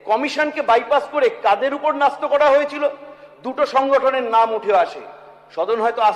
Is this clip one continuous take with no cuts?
yes; 0 cuts

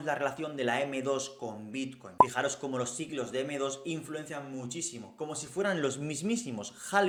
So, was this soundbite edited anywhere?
no; 0 cuts

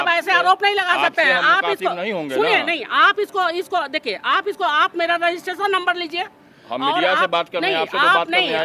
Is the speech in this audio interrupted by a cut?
no; 0 cuts

